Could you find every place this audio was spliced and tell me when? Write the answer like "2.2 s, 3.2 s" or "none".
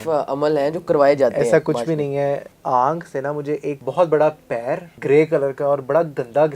2.5 s, 3.8 s, 4.9 s